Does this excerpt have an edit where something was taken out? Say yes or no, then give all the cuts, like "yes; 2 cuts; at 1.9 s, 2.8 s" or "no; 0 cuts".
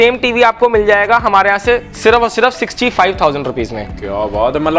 no; 0 cuts